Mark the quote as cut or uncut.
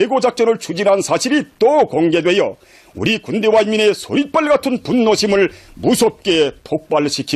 uncut